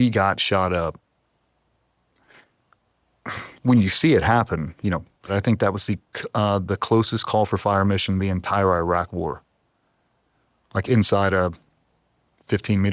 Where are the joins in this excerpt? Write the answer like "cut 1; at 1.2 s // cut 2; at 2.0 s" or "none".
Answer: cut 1; at 5.3 s